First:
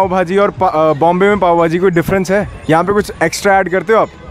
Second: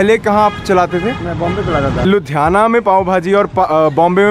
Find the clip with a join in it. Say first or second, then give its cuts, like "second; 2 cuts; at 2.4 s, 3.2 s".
second; 1 cut; at 2.0 s